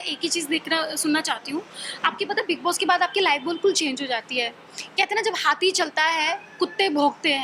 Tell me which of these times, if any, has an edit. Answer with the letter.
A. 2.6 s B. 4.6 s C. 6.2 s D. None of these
D